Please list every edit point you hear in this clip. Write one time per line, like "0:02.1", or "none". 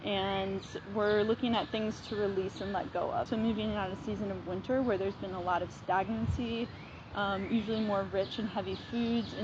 0:03.3